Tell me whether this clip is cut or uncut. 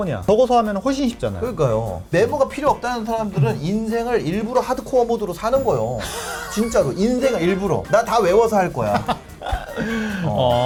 uncut